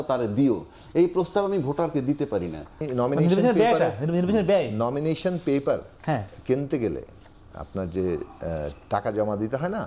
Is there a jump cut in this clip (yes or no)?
yes